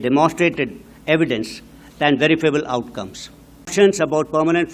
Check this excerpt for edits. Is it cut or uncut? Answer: cut